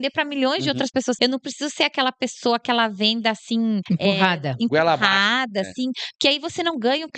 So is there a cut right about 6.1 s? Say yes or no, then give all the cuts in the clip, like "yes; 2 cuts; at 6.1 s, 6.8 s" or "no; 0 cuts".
no; 2 cuts; at 1.2 s, 3.8 s